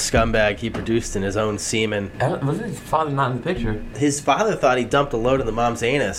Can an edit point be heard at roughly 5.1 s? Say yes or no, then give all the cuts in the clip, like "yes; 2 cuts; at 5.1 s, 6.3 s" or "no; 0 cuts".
no; 2 cuts; at 2.1 s, 3.9 s